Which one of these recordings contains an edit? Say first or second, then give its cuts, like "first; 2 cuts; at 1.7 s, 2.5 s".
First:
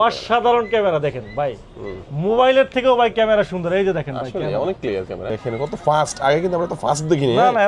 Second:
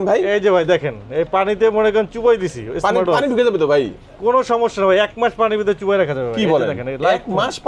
first; 1 cut; at 5.2 s